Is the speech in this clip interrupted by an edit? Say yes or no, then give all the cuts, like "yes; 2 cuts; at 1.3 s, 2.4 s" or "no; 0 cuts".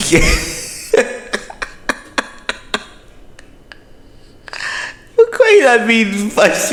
no; 0 cuts